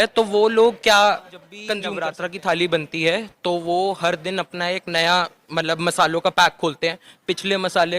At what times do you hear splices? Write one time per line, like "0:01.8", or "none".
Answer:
0:01.8